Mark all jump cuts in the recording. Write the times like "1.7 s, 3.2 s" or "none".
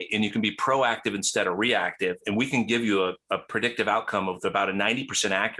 none